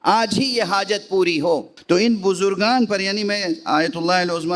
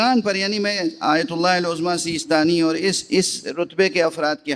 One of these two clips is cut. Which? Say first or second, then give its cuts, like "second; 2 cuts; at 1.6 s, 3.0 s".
first; 1 cut; at 1.7 s